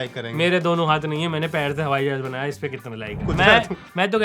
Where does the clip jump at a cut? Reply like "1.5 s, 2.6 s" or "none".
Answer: 3.1 s